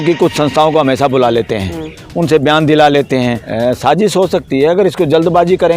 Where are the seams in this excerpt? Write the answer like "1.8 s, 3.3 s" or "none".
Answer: 3.4 s